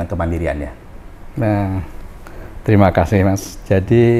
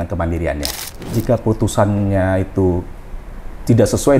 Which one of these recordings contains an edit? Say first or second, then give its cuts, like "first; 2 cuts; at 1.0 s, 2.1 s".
second; 1 cut; at 1.1 s